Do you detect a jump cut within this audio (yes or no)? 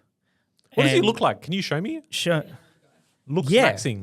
no